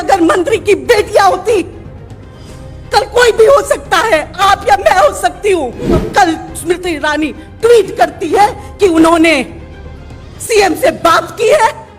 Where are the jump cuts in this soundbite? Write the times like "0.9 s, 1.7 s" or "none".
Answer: 6.1 s